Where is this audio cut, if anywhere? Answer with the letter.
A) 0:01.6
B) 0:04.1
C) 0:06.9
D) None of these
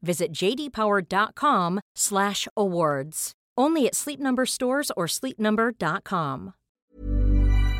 C